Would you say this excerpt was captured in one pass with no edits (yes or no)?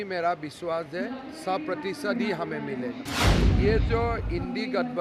no